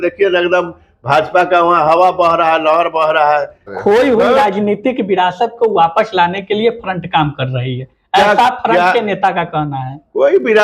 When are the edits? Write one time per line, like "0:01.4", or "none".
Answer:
0:03.7